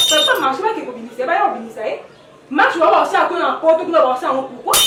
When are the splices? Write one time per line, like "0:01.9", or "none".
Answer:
none